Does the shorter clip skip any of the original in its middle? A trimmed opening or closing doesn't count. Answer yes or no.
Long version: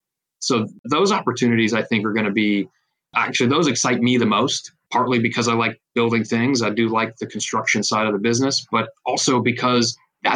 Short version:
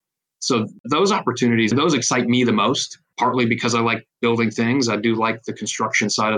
yes